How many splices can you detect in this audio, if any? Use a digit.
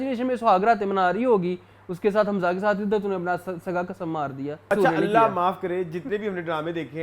1